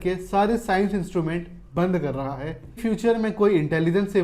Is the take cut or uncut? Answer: cut